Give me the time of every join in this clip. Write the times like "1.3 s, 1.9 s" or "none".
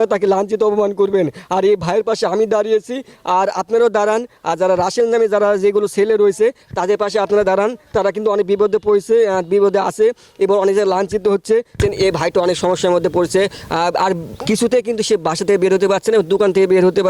11.8 s